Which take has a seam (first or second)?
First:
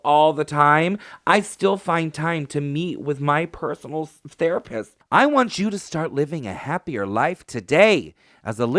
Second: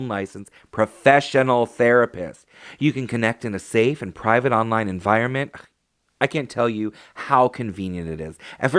first